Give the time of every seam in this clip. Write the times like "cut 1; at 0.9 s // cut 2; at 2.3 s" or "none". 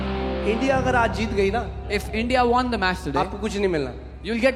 none